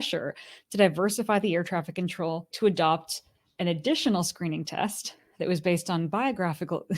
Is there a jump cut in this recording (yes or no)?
yes